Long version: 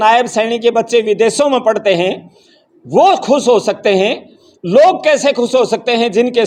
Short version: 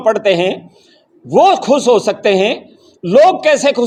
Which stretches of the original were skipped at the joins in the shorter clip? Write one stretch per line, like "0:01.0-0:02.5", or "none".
none